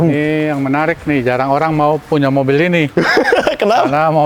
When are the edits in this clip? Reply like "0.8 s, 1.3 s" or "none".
none

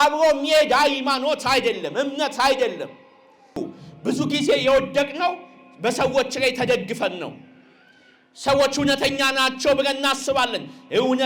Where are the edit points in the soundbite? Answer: 3.6 s

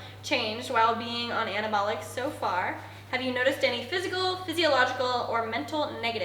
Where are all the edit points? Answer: none

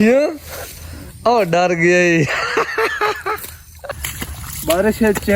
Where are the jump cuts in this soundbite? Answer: 3.9 s

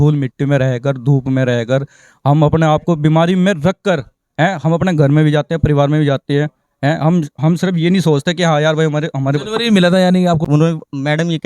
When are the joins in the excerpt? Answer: 10.4 s

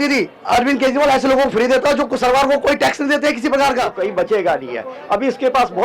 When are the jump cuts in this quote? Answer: 3.9 s

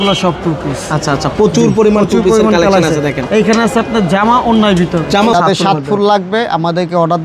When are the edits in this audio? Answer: 5.3 s

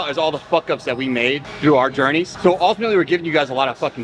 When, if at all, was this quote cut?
2.3 s

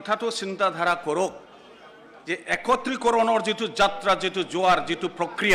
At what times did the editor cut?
none

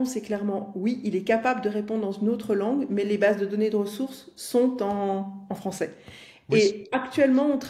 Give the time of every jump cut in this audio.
none

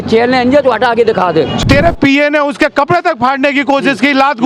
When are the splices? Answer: 1.6 s

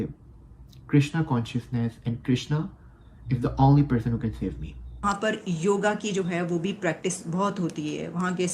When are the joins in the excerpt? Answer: 5.0 s

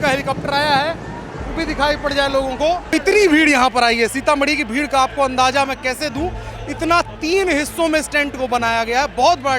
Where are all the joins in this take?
2.9 s

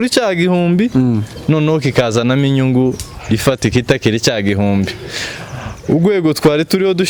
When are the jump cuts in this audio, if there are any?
none

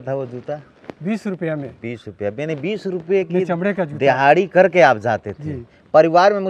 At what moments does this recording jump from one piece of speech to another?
none

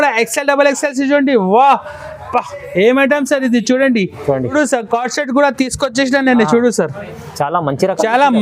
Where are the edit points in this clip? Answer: 4.5 s

